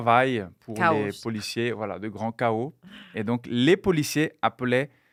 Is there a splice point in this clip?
no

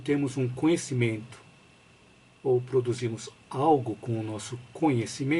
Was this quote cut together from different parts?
no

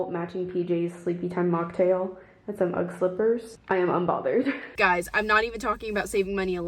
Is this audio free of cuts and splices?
no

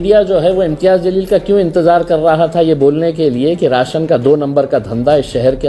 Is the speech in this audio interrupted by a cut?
no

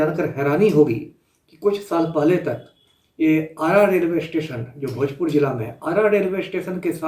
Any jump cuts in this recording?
no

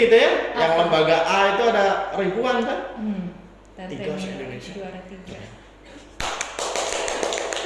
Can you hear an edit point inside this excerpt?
no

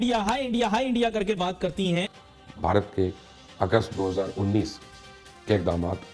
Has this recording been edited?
yes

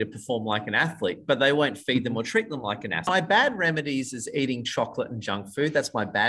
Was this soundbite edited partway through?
yes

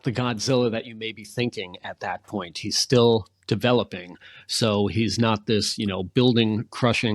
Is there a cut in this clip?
no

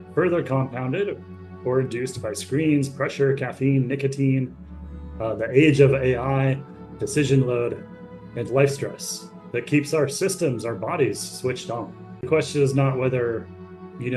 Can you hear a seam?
yes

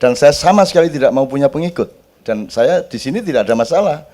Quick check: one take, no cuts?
no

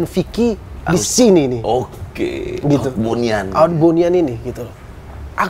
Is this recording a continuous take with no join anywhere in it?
yes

